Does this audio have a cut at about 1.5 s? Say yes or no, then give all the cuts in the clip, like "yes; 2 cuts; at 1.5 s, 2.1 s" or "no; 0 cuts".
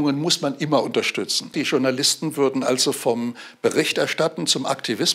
yes; 1 cut; at 1.5 s